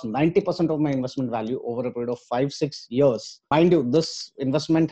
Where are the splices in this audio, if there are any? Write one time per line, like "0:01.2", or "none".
0:03.5